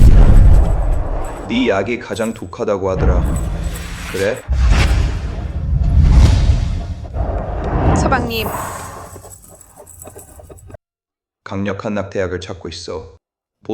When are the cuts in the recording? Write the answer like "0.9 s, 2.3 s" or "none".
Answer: 10.8 s